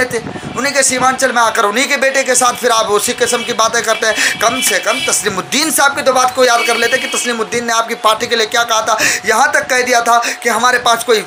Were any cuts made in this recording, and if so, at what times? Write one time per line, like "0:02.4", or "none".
none